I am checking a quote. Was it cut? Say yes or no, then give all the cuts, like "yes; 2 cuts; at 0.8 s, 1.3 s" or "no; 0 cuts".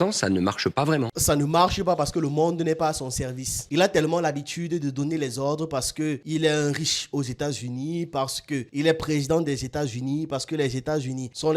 no; 0 cuts